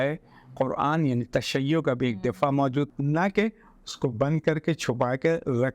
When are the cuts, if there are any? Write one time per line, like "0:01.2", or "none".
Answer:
0:02.9